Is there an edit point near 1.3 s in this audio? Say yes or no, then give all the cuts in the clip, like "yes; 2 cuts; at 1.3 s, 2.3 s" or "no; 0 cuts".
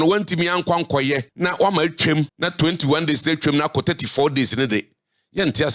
yes; 2 cuts; at 1.3 s, 2.4 s